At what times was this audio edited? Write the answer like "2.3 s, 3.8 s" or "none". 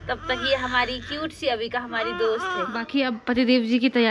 2.5 s